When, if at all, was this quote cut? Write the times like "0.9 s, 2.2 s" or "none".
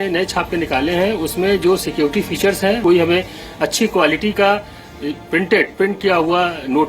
2.8 s